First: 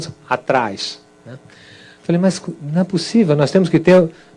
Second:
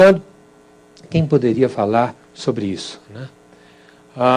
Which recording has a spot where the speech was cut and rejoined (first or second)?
first